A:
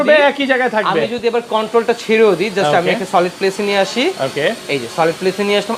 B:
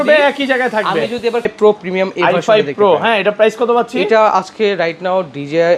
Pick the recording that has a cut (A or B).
B